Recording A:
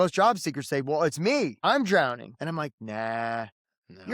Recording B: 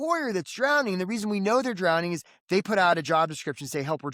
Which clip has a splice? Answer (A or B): A